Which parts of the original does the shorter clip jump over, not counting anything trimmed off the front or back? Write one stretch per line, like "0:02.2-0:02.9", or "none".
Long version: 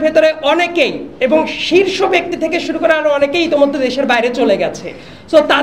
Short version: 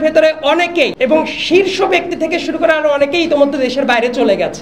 0:00.9-0:01.1